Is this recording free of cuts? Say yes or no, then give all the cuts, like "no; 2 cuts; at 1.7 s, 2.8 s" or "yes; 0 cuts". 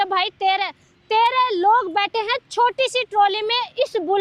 yes; 0 cuts